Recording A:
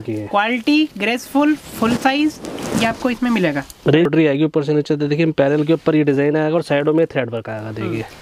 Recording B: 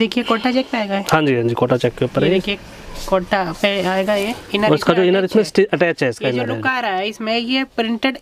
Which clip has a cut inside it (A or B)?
A